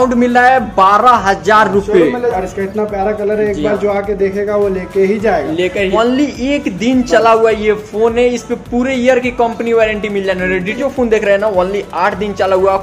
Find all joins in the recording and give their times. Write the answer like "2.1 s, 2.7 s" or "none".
2.3 s, 5.9 s, 10.7 s